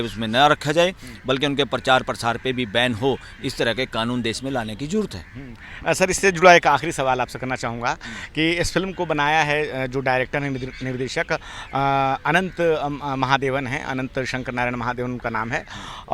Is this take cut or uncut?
uncut